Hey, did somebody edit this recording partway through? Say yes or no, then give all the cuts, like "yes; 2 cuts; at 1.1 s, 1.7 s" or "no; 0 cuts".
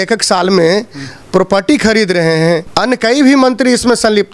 no; 0 cuts